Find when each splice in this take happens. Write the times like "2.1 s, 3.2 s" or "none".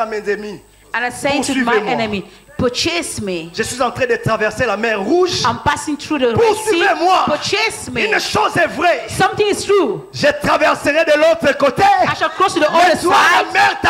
none